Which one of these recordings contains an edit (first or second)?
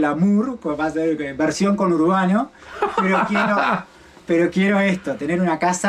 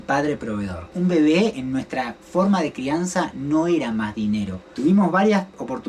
second